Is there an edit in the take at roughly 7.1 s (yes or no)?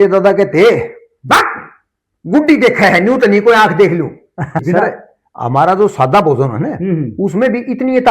no